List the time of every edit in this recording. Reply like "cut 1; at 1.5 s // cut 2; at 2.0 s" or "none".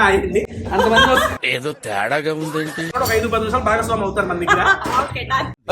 cut 1; at 2.8 s // cut 2; at 4.8 s